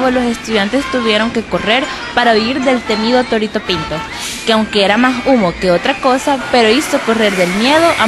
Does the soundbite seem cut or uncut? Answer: uncut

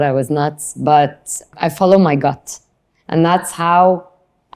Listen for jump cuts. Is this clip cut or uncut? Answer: cut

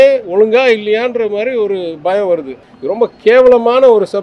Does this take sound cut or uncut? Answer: cut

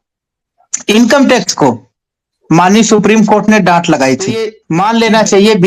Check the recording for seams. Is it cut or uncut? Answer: cut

